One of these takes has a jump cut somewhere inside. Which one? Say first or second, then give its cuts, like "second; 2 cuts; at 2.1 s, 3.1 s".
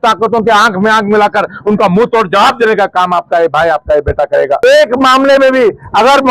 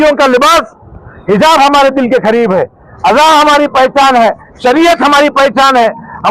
first; 1 cut; at 4.6 s